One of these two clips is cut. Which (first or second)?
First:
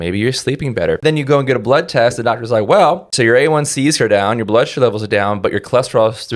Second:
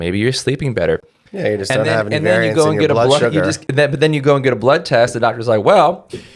first